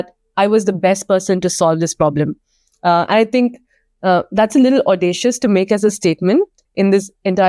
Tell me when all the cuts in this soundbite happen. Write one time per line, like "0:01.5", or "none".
0:06.6